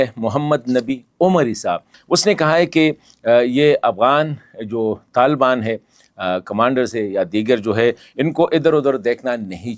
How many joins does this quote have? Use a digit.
1